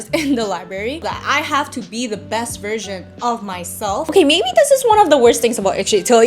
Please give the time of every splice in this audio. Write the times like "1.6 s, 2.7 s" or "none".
1.0 s, 4.1 s